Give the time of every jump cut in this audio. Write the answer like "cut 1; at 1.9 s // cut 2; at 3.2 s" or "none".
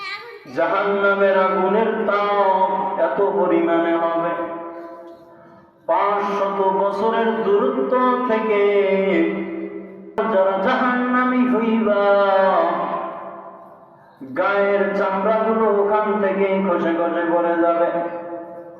cut 1; at 10.2 s